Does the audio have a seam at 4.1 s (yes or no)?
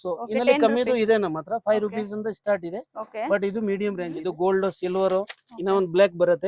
yes